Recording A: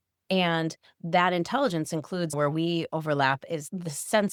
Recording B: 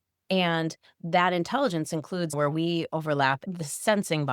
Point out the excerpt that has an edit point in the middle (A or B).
B